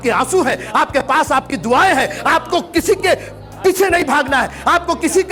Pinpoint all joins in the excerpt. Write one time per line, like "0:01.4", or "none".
none

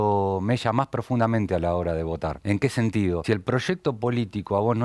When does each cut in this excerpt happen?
0:02.4
0:03.2

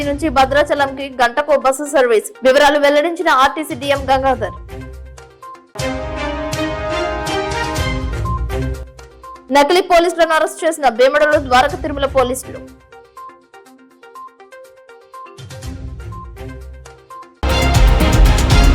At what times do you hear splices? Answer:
0:17.3

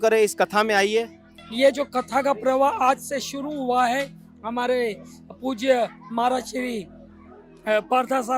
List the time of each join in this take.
0:01.4

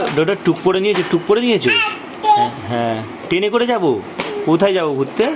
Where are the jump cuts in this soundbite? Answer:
none

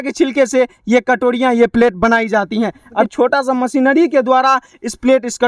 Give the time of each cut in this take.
0:03.0

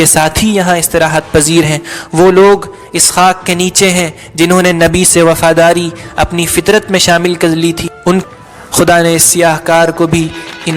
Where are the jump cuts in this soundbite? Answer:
0:08.2

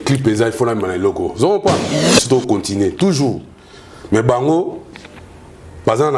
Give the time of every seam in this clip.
none

